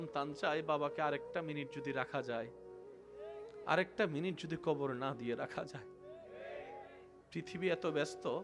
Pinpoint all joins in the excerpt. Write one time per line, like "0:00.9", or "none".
none